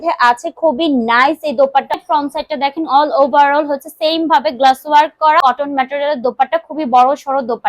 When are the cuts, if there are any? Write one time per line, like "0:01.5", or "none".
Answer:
0:02.0
0:05.4